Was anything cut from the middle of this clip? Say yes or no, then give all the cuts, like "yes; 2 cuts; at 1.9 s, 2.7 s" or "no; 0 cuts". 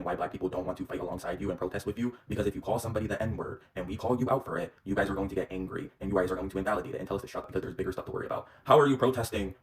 yes; 1 cut; at 7.4 s